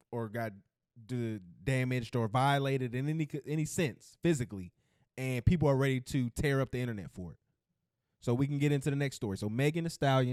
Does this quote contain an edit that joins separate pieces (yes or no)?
no